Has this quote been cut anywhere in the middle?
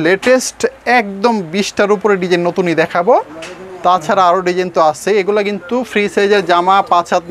no; 0 cuts

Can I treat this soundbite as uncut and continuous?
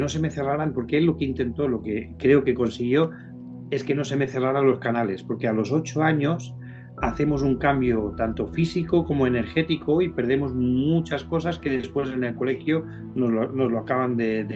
yes; 0 cuts

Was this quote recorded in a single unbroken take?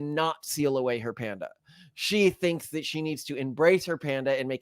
yes; 0 cuts

